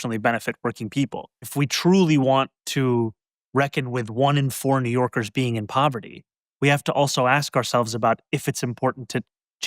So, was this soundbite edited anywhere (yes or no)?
yes